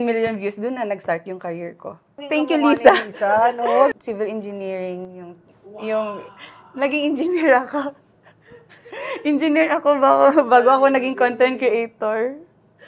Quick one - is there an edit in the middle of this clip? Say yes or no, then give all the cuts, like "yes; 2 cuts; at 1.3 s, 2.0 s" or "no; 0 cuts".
yes; 2 cuts; at 2.2 s, 3.9 s